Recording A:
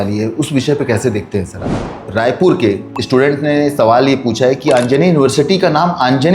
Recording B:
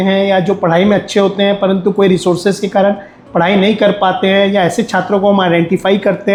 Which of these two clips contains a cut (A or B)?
A